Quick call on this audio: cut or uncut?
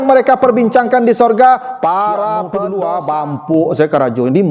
cut